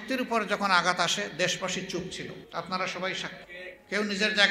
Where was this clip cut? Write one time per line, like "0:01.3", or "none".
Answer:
0:02.4
0:03.5